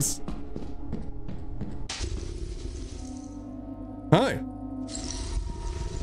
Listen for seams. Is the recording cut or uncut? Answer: cut